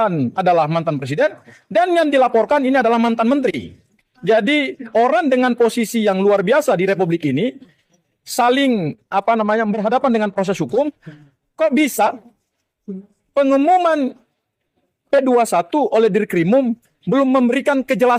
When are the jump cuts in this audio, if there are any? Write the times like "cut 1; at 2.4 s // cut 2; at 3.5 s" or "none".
none

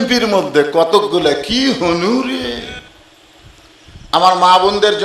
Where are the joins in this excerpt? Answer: cut 1; at 2.8 s

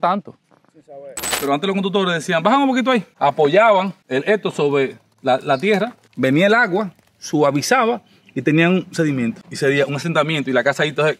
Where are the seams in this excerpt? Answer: cut 1; at 1.3 s

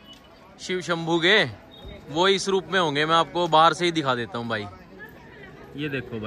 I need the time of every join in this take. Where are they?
none

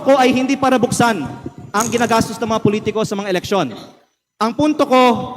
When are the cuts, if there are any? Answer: none

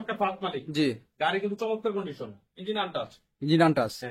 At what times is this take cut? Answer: none

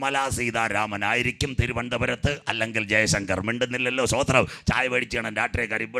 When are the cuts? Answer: none

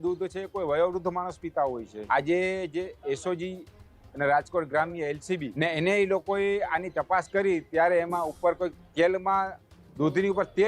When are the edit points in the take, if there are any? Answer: cut 1; at 1.9 s // cut 2; at 5.5 s

